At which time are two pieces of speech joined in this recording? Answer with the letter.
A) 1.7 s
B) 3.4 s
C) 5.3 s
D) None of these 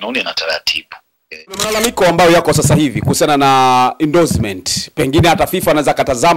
A